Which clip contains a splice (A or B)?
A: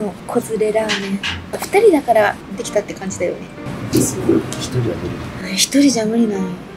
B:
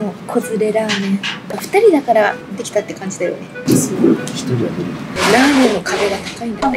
B